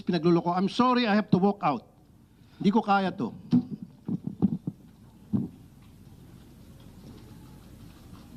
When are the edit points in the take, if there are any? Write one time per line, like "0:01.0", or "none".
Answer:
none